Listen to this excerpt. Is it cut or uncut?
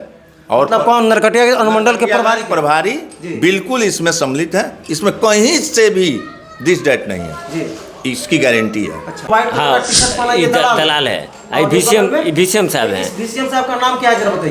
cut